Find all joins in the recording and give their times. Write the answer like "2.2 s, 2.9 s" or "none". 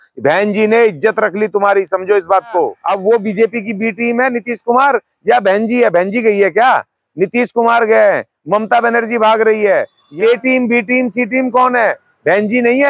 2.8 s, 10.0 s